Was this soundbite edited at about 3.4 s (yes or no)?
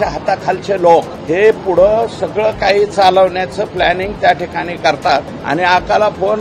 no